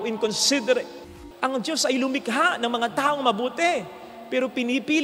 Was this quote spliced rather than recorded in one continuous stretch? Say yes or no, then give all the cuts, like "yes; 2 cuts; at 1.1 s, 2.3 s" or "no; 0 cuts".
yes; 1 cut; at 1.1 s